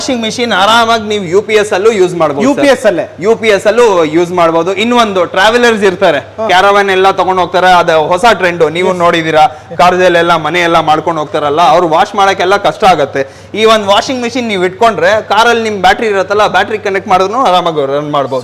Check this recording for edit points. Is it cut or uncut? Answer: uncut